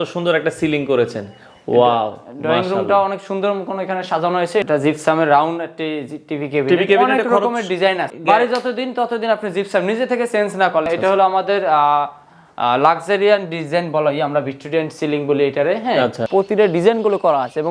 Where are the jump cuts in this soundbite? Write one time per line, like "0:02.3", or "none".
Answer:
0:04.6
0:08.1
0:10.8
0:16.2